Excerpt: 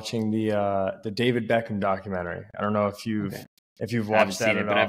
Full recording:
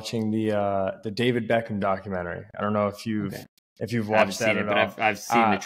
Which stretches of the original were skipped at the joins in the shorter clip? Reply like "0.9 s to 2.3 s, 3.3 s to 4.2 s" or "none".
none